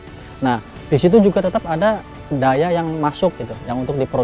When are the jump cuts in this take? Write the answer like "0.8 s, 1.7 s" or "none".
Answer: 2.1 s